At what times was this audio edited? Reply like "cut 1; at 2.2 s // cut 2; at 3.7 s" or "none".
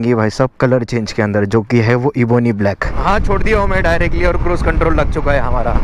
cut 1; at 2.9 s